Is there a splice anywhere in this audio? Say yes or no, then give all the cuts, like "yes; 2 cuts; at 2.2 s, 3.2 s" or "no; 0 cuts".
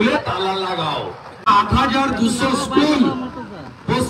yes; 1 cut; at 1.5 s